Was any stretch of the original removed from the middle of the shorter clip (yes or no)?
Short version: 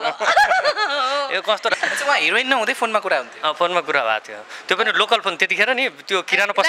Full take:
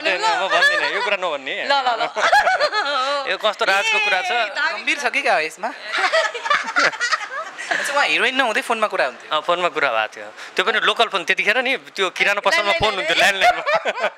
yes